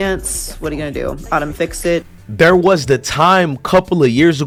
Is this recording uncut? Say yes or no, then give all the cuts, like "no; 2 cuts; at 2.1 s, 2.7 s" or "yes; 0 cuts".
yes; 0 cuts